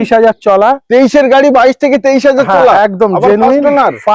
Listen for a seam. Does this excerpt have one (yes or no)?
no